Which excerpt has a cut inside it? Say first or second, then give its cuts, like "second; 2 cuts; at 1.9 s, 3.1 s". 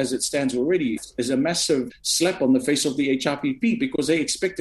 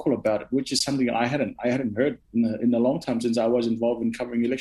first; 2 cuts; at 1.0 s, 1.9 s